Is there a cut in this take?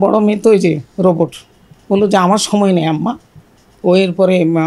no; 0 cuts

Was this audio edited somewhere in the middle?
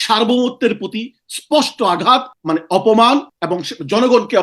yes; 2 cuts; at 2.3 s, 3.4 s

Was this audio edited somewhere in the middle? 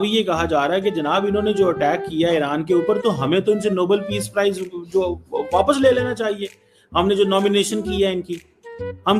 no; 0 cuts

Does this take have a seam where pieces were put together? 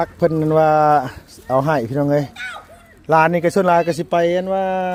no; 0 cuts

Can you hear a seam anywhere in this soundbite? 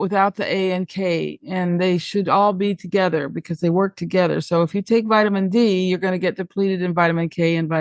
no; 0 cuts

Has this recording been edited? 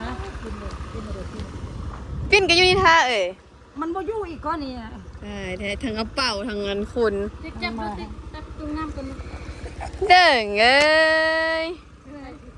no; 0 cuts

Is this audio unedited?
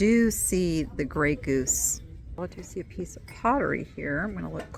no; 1 cut; at 2.4 s

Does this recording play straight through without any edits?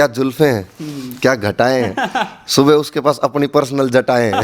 yes; 0 cuts

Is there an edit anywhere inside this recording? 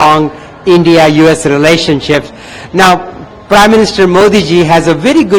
no; 0 cuts

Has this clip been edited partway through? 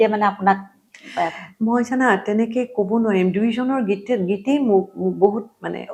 no; 0 cuts

